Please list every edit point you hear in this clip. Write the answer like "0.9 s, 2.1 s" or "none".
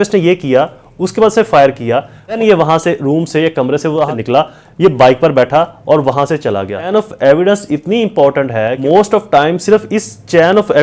2.4 s, 4.1 s, 6.9 s, 8.7 s